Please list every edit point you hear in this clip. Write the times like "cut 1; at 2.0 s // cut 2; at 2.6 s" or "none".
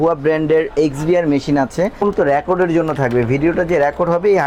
cut 1; at 2.0 s